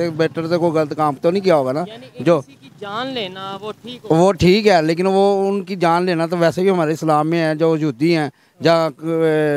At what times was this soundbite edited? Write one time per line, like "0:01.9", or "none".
none